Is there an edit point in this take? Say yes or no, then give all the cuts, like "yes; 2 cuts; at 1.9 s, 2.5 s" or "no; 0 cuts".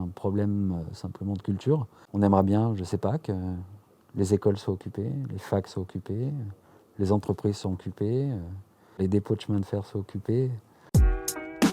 yes; 1 cut; at 10.7 s